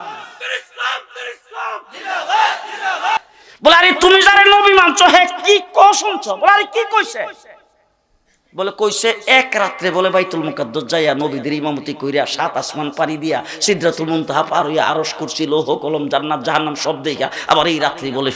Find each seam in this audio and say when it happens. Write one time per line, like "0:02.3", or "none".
0:03.3